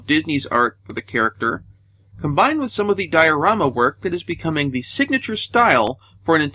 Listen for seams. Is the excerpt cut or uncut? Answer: uncut